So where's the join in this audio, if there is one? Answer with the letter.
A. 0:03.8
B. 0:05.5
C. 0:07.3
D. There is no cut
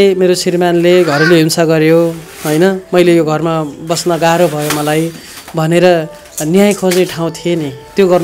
D